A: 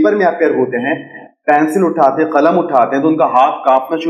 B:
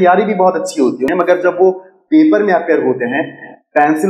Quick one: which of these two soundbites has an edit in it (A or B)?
B